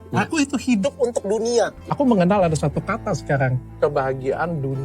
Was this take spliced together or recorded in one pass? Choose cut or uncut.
cut